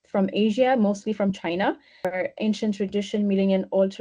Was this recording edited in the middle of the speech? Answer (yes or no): yes